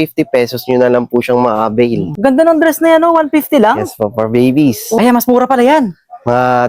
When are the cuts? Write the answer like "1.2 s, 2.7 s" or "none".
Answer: 2.1 s, 4.8 s

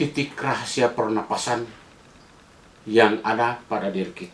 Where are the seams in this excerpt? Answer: none

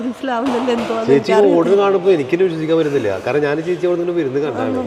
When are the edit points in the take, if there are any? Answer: none

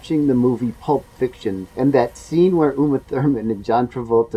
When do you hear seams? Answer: 1.6 s

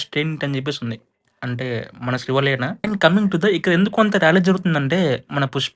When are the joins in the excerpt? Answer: 2.9 s

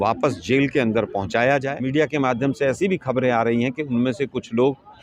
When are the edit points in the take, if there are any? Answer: 1.8 s

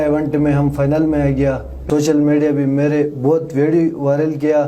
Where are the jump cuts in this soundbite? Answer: 1.7 s

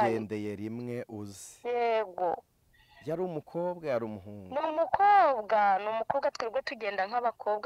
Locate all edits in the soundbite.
none

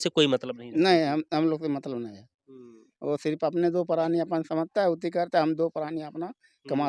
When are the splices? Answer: none

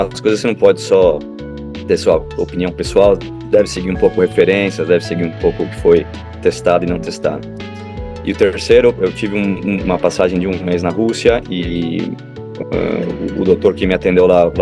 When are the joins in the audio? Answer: none

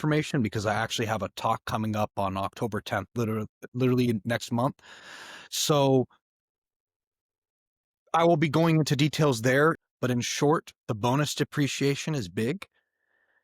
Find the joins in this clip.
9.8 s

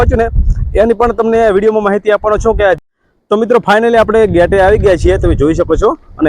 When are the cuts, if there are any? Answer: 2.8 s

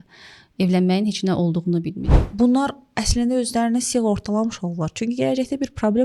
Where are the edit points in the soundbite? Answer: 2.0 s

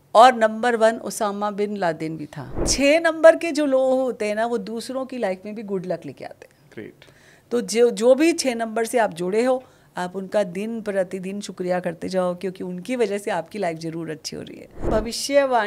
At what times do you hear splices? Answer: 2.7 s, 14.7 s

